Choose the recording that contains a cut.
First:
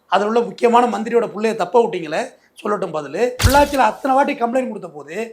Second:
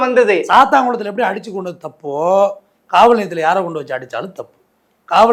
first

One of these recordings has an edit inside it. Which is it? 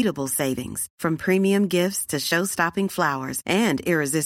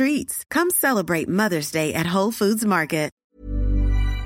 second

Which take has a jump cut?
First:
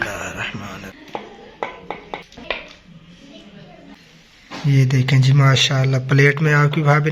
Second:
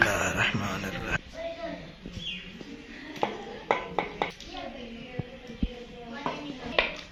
first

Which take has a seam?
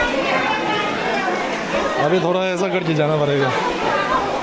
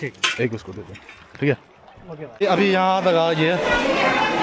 second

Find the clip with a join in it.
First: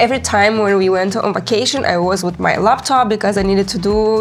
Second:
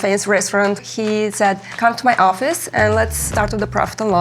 second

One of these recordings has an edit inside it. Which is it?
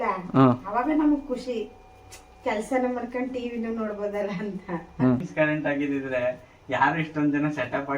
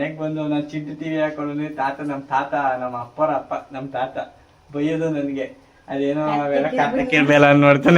first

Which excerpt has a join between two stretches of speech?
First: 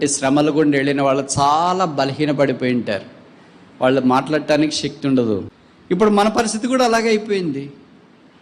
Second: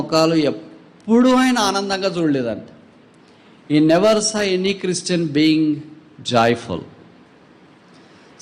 first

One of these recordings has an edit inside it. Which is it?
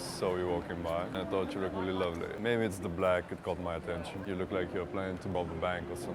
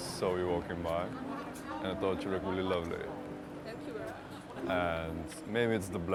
first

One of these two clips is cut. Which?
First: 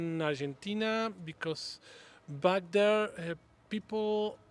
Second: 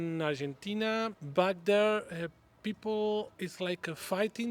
second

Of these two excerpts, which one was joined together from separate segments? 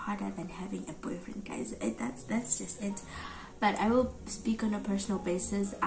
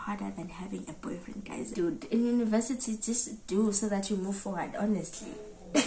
second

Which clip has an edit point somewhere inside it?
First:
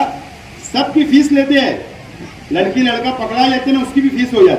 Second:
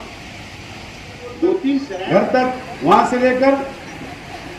second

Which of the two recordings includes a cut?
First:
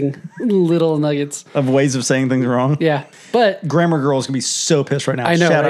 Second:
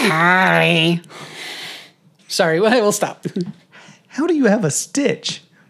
first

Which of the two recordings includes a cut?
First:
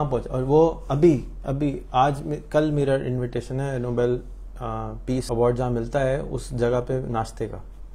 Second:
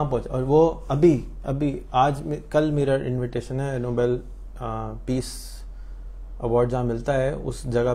first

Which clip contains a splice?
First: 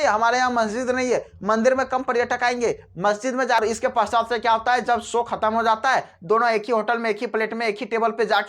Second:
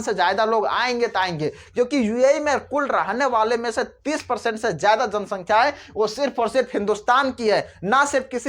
first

